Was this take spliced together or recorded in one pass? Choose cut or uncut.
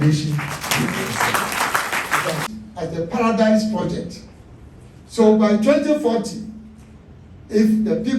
cut